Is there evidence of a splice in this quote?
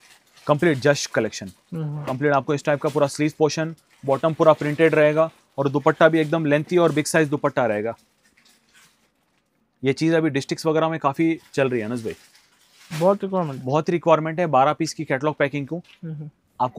no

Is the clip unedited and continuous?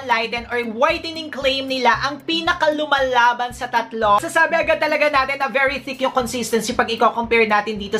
no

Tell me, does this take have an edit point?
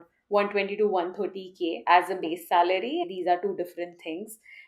yes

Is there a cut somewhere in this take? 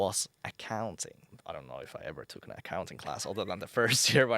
yes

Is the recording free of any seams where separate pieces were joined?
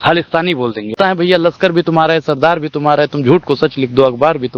no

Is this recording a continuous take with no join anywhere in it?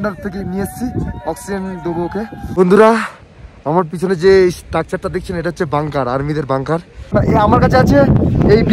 no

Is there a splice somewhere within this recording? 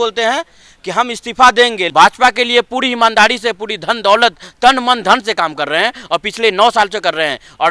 yes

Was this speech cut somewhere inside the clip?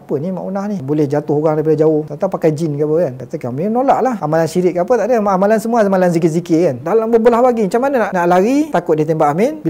yes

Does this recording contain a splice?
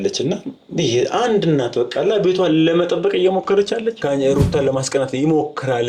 yes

